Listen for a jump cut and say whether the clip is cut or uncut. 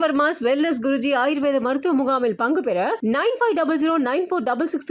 uncut